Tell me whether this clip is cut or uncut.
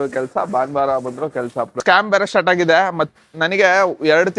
cut